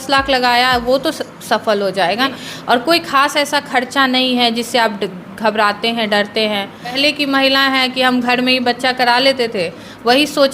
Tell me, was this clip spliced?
yes; 2 cuts; at 2.2 s, 7.0 s

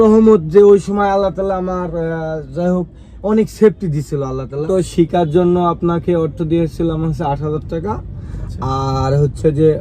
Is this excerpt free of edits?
no; 1 cut; at 4.6 s

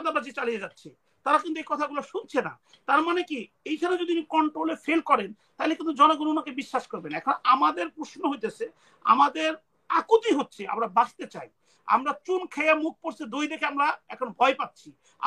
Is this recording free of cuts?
yes; 0 cuts

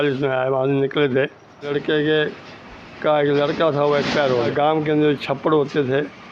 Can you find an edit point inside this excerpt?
yes; 2 cuts; at 1.7 s, 4.5 s

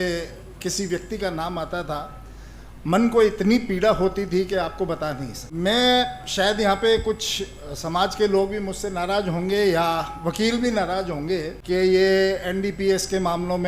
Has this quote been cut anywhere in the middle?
yes; 2 cuts; at 5.4 s, 11.5 s

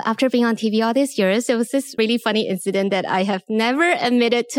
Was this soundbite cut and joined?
yes; 1 cut; at 1.9 s

